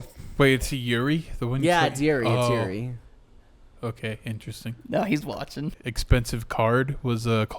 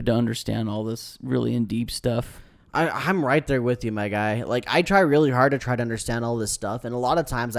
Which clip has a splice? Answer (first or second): first